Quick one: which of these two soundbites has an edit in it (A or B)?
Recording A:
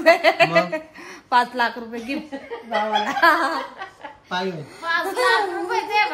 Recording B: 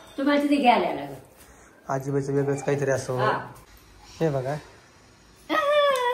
B